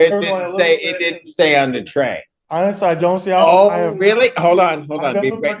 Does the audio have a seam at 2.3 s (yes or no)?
yes